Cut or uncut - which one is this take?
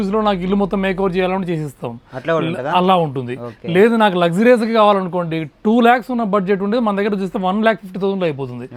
uncut